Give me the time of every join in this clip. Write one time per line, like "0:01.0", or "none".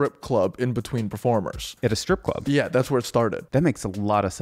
0:01.6
0:03.4